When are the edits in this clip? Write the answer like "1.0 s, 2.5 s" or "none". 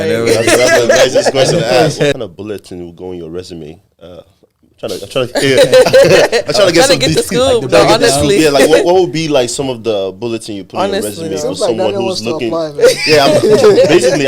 2.1 s